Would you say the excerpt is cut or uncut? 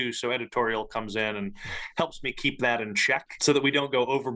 cut